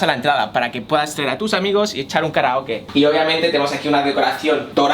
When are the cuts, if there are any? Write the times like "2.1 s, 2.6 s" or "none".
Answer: 2.9 s